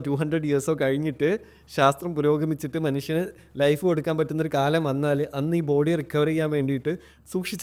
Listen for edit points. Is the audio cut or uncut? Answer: uncut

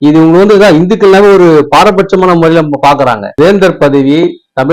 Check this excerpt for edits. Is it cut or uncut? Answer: cut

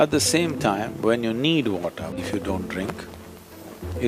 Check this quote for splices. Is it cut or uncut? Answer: cut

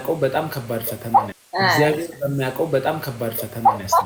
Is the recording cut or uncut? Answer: uncut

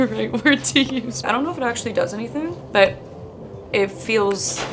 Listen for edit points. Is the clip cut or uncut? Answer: cut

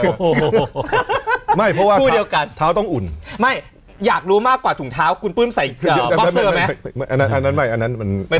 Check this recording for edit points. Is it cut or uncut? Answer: uncut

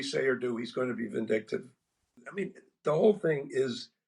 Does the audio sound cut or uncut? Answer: cut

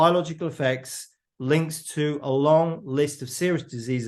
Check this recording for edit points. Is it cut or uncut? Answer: uncut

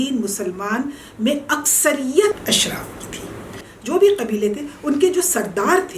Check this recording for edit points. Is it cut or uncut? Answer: cut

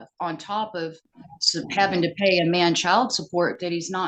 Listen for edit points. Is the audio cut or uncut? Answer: uncut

